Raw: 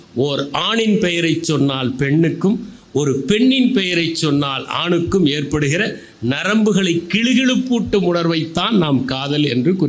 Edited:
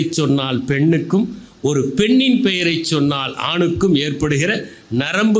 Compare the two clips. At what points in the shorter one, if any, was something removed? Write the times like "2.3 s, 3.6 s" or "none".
none

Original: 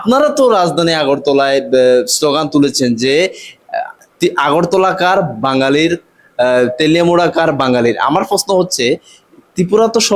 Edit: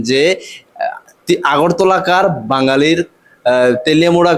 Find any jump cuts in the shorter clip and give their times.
none

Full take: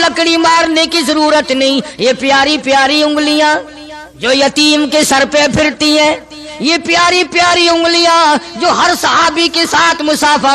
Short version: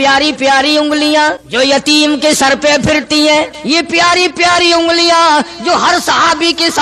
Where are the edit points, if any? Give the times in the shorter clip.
1.4 s, 3.6 s

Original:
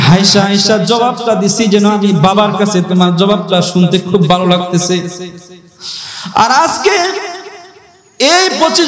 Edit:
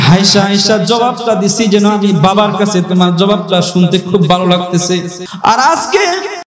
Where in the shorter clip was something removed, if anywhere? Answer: 5.2 s

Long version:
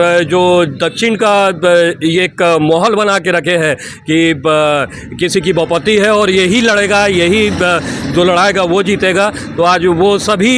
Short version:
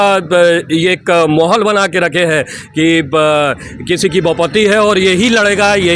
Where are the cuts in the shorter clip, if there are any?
none

